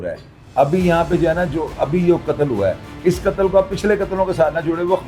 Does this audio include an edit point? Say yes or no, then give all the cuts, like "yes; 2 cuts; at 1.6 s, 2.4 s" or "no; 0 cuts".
no; 0 cuts